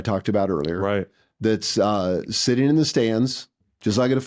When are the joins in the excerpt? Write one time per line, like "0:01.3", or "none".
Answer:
none